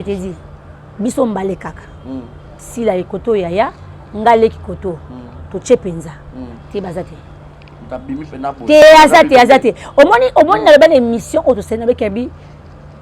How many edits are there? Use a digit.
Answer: 1